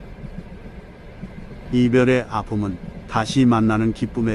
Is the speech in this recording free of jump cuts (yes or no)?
no